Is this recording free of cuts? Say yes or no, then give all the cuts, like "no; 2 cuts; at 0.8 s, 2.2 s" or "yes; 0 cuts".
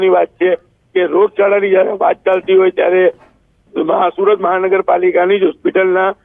yes; 0 cuts